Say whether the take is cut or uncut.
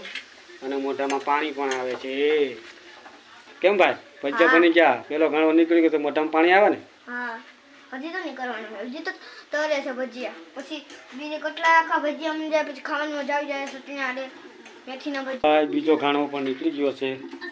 cut